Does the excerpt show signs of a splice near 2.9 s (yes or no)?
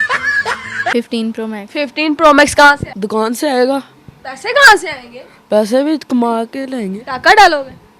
yes